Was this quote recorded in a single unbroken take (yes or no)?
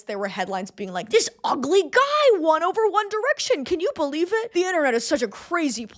yes